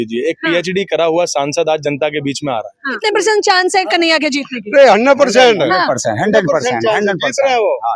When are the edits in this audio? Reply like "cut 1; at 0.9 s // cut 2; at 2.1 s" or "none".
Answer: cut 1; at 2.9 s

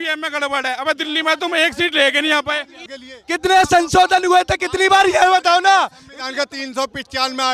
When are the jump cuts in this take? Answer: cut 1; at 2.8 s

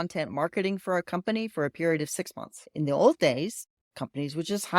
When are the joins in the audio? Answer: cut 1; at 2.6 s

